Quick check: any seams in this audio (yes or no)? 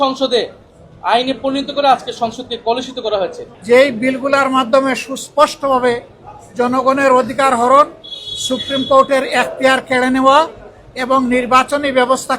yes